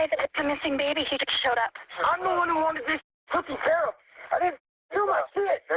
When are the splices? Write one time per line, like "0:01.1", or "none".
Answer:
0:01.9